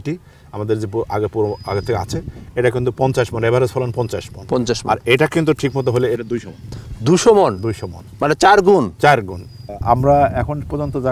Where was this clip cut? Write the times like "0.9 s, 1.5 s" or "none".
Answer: 9.7 s

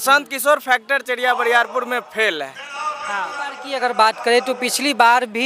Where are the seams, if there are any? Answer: 3.6 s

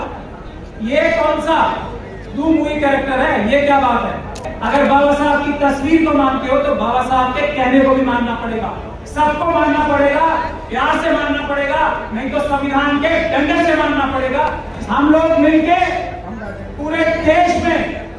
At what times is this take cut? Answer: 4.5 s, 14.7 s

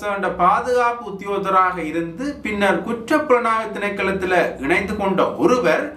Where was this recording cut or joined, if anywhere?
none

